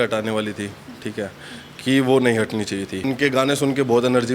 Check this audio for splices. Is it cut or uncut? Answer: cut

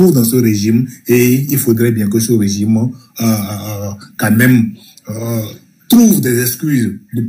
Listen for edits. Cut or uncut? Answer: uncut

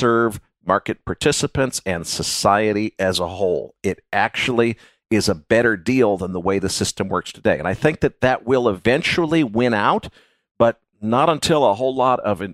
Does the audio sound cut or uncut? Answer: cut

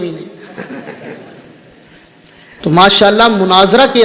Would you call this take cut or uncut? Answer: cut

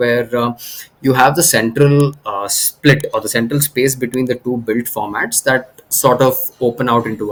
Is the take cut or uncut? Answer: uncut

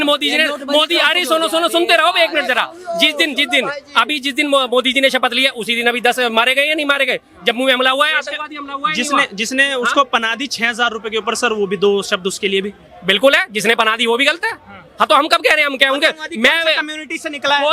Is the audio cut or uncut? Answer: uncut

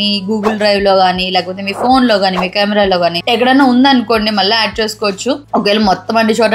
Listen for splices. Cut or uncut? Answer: uncut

